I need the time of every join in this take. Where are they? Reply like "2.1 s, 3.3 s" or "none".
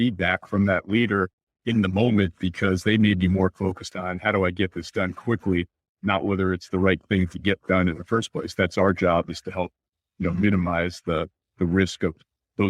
none